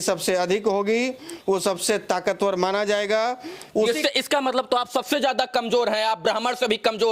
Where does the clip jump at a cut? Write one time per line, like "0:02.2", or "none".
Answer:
none